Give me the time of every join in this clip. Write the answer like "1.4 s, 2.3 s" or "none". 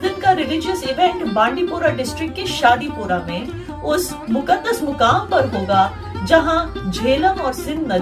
none